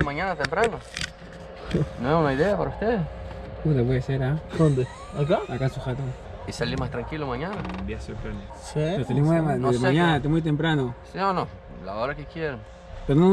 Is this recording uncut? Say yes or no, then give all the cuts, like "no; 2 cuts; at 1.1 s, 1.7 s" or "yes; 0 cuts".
no; 2 cuts; at 6.2 s, 8.6 s